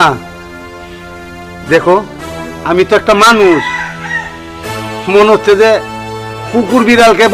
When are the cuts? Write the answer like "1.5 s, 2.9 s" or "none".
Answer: none